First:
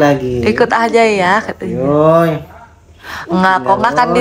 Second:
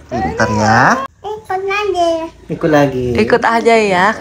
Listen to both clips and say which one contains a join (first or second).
second